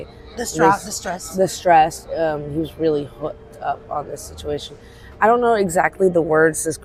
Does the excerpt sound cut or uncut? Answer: uncut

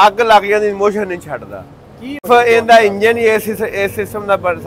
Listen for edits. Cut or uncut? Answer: cut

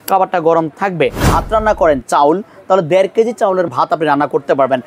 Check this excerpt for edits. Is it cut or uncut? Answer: cut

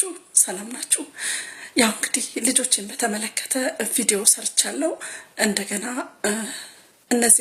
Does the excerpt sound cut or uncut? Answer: uncut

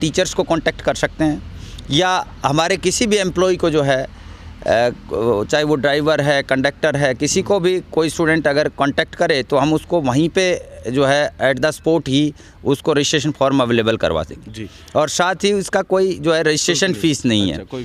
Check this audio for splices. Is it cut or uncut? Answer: uncut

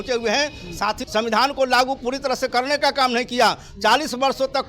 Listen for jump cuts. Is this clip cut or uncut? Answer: cut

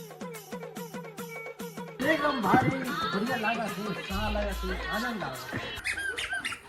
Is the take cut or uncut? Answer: cut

